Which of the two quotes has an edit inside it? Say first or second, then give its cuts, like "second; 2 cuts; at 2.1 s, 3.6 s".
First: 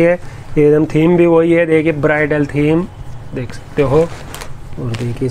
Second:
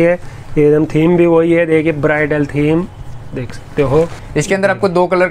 second; 1 cut; at 4.2 s